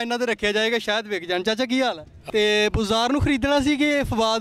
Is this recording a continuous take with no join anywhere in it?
no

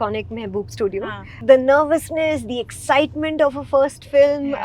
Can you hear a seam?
no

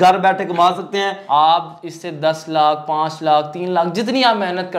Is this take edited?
yes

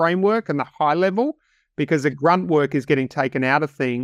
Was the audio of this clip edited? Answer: no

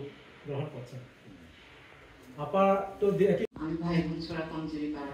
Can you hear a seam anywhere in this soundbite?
no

